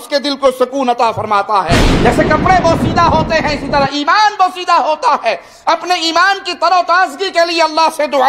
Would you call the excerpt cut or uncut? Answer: cut